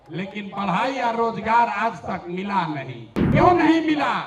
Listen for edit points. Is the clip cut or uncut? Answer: cut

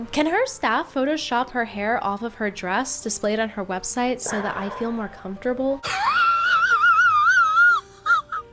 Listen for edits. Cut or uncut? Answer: uncut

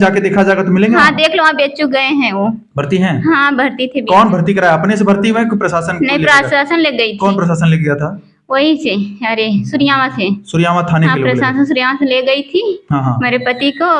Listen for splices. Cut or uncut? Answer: uncut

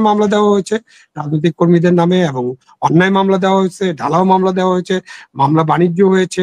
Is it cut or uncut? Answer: uncut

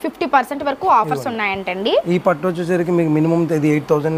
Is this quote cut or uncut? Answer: uncut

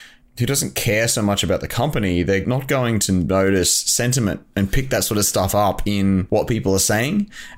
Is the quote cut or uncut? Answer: cut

